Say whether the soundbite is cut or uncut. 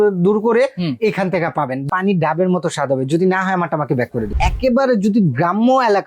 cut